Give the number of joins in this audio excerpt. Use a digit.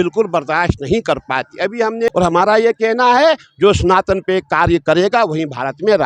1